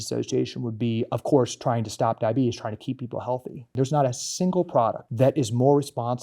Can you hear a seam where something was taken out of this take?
yes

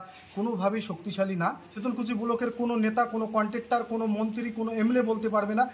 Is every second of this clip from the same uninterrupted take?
no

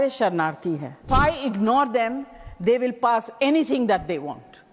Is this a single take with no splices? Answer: no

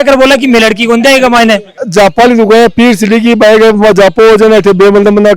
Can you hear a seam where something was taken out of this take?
yes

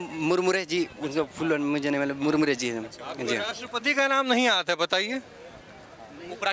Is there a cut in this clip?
no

